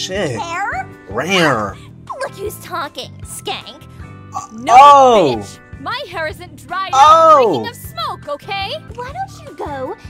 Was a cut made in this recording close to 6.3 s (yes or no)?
no